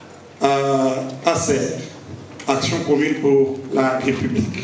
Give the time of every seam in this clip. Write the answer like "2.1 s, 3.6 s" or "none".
none